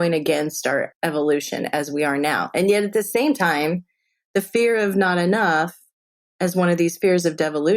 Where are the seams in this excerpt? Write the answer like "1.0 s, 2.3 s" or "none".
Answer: 0.9 s

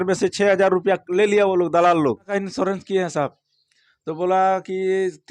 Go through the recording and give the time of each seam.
2.3 s

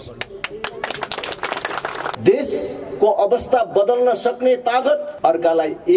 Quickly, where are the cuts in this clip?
2.1 s, 5.1 s

